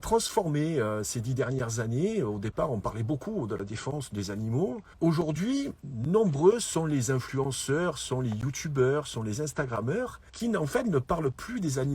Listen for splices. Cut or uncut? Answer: cut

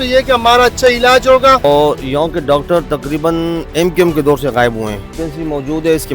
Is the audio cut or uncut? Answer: cut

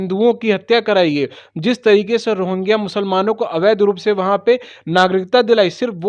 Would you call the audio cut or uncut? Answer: uncut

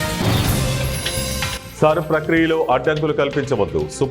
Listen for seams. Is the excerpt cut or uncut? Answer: cut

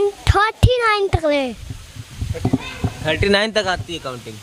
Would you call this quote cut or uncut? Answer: uncut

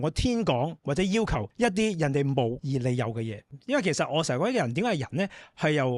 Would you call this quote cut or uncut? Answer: cut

